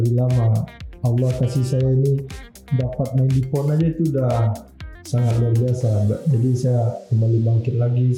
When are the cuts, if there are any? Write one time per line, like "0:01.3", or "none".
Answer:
none